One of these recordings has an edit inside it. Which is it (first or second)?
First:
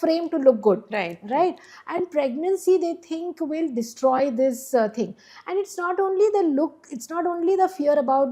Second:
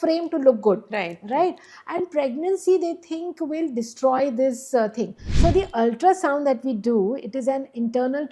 second